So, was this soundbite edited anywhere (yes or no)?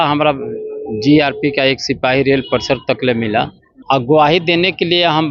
yes